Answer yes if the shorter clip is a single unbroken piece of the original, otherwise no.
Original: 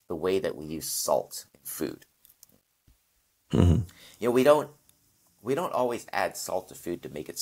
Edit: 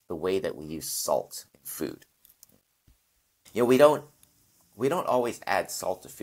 no